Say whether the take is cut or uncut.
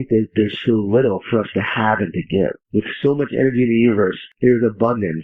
cut